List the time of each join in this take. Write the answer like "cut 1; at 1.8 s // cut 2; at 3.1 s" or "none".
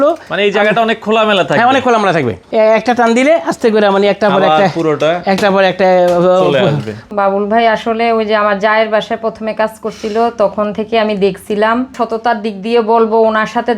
cut 1; at 2.4 s // cut 2; at 7.1 s // cut 3; at 11.9 s